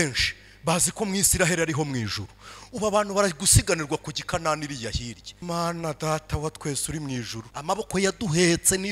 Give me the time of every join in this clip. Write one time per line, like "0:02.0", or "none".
0:05.3
0:07.4